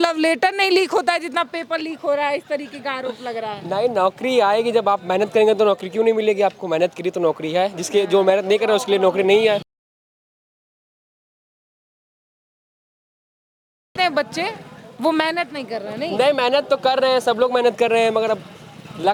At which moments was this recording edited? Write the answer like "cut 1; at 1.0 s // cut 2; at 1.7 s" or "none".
none